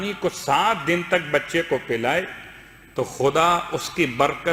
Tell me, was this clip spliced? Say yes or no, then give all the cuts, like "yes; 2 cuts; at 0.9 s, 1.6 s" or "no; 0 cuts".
no; 0 cuts